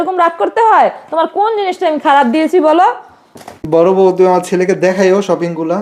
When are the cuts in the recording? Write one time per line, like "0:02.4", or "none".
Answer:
0:03.5